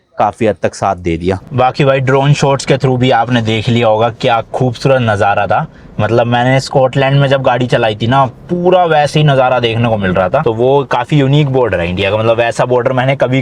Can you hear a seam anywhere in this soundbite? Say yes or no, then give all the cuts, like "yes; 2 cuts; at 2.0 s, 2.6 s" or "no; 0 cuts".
yes; 2 cuts; at 1.4 s, 10.4 s